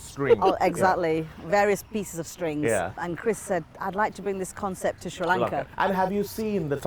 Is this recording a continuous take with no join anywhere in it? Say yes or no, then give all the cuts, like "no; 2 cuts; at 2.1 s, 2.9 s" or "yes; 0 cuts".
no; 2 cuts; at 2.9 s, 5.7 s